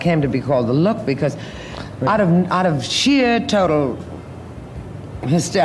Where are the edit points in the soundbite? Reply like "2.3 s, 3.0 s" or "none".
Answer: none